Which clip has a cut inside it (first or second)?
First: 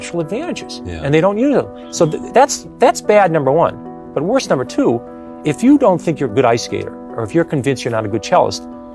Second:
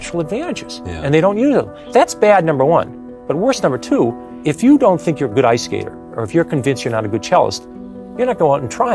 second